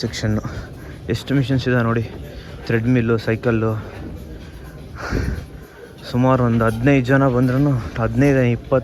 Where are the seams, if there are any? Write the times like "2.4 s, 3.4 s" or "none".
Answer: none